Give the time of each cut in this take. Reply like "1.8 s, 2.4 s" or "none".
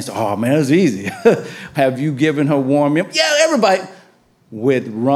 1.7 s